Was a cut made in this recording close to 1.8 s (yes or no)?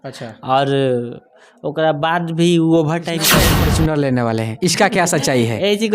no